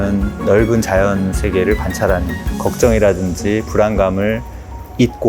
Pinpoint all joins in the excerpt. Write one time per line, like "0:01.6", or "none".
0:02.3